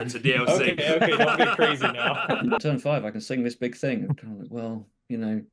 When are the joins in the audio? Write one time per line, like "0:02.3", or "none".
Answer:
0:02.6